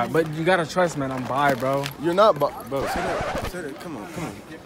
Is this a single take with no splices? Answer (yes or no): yes